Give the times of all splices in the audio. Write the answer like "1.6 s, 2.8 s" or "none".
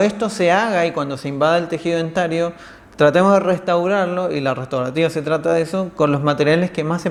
none